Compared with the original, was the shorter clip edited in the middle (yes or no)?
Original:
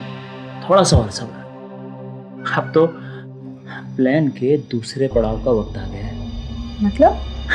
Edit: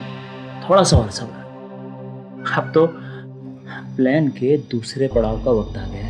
no